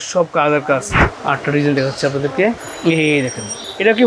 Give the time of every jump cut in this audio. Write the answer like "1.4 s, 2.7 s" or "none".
0.9 s